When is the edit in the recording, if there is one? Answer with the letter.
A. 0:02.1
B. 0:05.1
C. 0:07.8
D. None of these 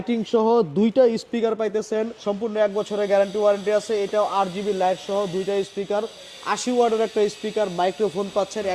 A